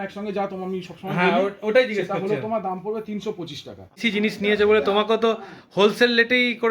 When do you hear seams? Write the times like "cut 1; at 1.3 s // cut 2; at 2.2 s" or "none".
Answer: cut 1; at 4.0 s